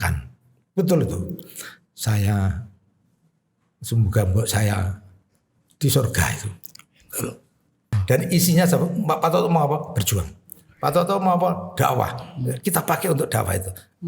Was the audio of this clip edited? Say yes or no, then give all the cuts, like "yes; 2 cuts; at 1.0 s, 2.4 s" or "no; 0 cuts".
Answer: yes; 1 cut; at 7.9 s